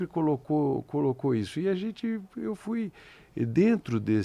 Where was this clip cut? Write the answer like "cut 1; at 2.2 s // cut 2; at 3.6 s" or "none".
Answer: none